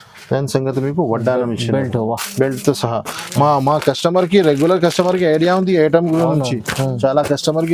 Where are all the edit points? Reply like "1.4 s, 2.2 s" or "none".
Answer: none